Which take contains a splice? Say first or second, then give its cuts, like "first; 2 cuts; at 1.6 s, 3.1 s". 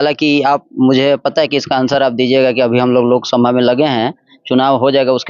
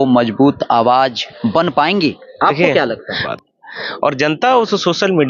second; 1 cut; at 3.3 s